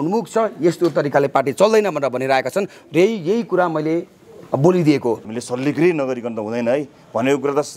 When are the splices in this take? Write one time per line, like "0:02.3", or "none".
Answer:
0:05.2